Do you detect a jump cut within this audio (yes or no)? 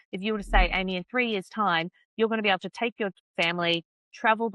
no